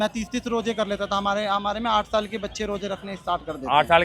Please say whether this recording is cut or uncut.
uncut